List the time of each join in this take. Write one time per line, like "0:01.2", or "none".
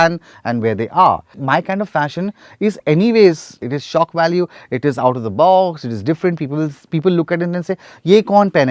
0:01.4
0:03.6